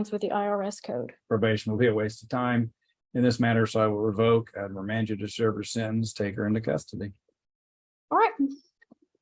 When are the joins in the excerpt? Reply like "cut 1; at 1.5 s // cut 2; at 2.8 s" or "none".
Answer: cut 1; at 1.2 s

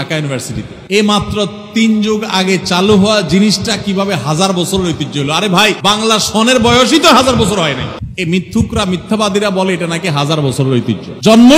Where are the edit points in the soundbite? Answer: none

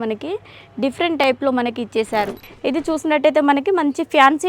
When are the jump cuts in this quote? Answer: cut 1; at 2.4 s

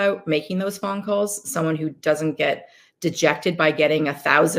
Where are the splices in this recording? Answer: none

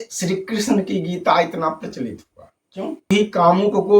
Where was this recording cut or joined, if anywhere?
cut 1; at 3.1 s

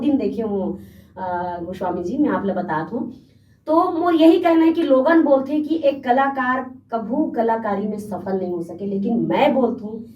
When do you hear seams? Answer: none

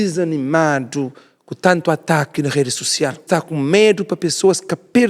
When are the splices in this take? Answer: cut 1; at 3.2 s

